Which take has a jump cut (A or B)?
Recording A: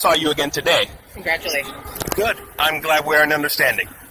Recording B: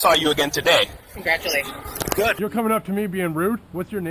B